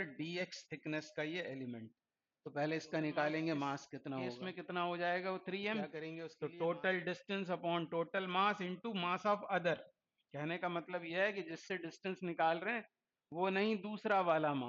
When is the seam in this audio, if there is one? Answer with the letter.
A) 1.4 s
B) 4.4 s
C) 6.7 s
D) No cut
B